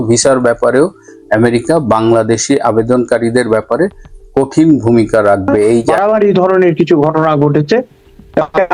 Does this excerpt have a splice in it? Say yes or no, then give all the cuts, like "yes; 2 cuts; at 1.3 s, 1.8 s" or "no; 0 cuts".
yes; 1 cut; at 5.9 s